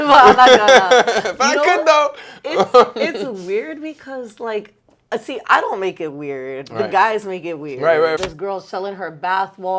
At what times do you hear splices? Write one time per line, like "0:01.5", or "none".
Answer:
0:08.2